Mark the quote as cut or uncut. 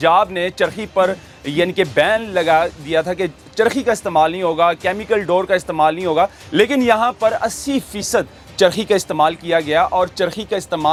uncut